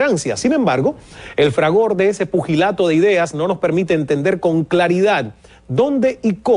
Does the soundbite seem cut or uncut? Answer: uncut